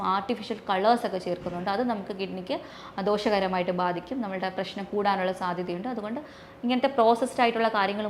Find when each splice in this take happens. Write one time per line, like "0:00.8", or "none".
none